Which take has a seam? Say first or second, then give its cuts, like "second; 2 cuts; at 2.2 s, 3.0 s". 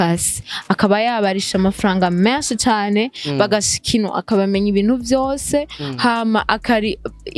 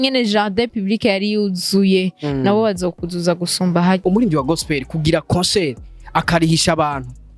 second; 1 cut; at 4.0 s